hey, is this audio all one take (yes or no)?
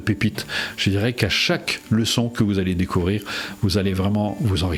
yes